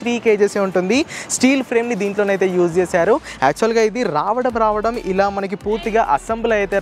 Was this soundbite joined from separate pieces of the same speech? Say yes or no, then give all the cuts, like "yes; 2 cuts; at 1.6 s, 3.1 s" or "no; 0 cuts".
no; 0 cuts